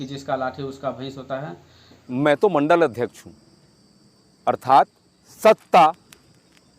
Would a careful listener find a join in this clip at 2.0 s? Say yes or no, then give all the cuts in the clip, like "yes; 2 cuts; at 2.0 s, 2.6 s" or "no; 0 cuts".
yes; 1 cut; at 2.0 s